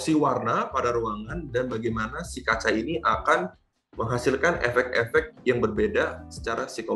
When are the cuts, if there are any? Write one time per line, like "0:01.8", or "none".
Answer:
none